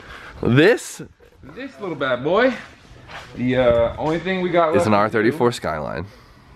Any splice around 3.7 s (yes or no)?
yes